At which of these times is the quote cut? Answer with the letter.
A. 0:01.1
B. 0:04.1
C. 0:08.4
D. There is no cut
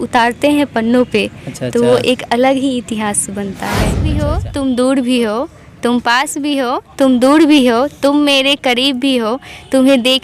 B